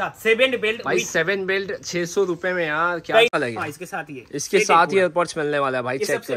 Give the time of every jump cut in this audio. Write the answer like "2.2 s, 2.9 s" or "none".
3.3 s